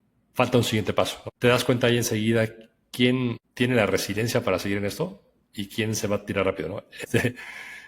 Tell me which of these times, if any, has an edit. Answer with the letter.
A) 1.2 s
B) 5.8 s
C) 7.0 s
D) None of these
C